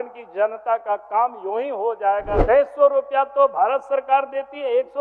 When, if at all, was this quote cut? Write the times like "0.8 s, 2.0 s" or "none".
2.4 s